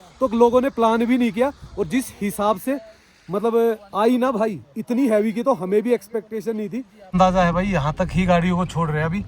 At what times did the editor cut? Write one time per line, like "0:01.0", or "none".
0:06.9